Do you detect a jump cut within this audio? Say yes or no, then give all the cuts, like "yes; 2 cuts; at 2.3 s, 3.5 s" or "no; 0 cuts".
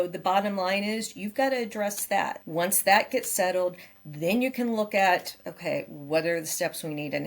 yes; 1 cut; at 2.4 s